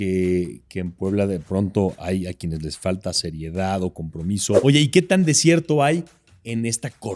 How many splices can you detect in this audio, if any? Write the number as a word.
one